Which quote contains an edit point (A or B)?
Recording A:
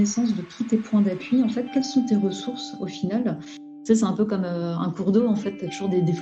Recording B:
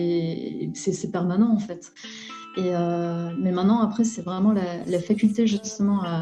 A